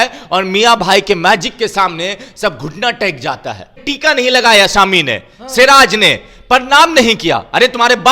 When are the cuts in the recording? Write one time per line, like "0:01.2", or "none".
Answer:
0:03.8